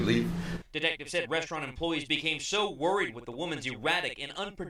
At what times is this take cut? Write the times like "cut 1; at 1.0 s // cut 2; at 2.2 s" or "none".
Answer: none